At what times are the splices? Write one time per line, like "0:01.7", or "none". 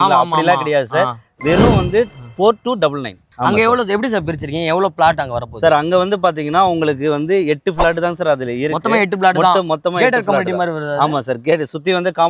0:03.2